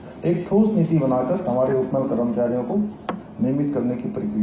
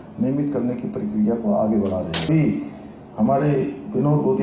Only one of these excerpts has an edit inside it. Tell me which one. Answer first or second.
second